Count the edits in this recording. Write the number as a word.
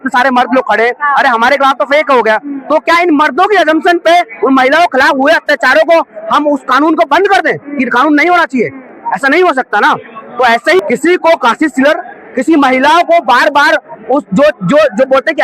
one